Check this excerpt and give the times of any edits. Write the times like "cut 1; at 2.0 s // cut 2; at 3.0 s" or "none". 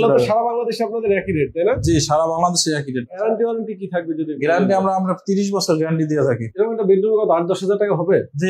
cut 1; at 3.2 s // cut 2; at 6.5 s